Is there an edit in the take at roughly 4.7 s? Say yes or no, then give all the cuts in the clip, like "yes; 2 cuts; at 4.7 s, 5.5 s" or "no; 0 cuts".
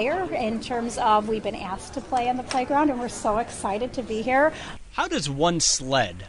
yes; 1 cut; at 4.7 s